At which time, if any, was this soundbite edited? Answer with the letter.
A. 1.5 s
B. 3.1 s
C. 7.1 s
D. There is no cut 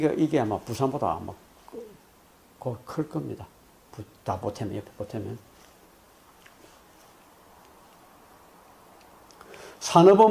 B